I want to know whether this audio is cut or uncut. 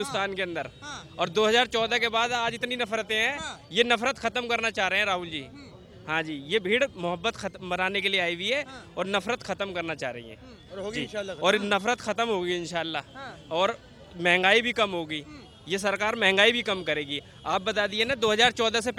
uncut